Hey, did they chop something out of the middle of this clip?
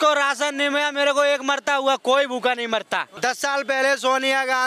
yes; 1 cut; at 3.1 s

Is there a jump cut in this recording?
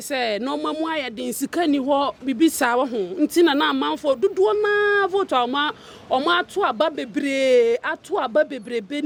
no; 0 cuts

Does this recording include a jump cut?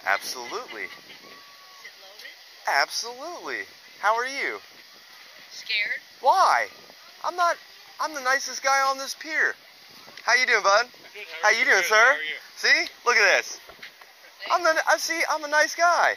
no; 0 cuts

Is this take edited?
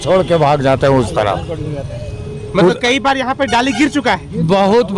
no; 0 cuts

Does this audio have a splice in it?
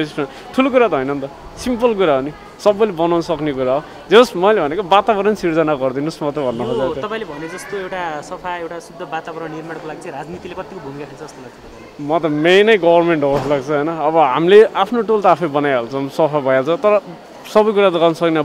no; 0 cuts

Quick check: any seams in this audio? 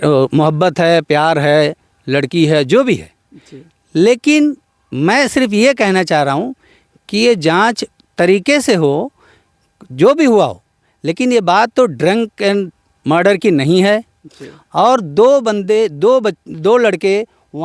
no; 0 cuts

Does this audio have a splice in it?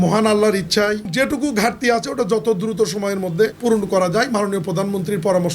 yes; 2 cuts; at 1.1 s, 3.6 s

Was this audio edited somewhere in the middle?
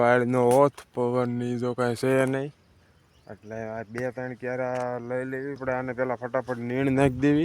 yes; 1 cut; at 5.6 s

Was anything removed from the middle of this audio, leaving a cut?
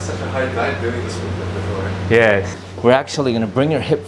yes; 1 cut; at 2.6 s

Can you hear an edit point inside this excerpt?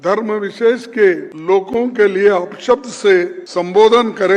yes; 2 cuts; at 1.3 s, 3.4 s

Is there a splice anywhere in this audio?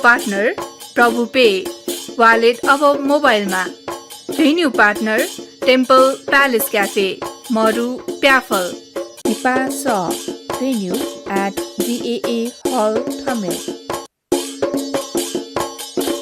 yes; 3 cuts; at 5.4 s, 9.1 s, 14.0 s

